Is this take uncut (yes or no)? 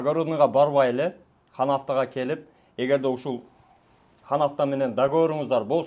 yes